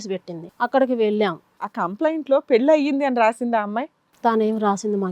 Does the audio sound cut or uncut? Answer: cut